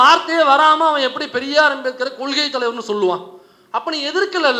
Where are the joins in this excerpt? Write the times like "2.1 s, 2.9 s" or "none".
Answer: none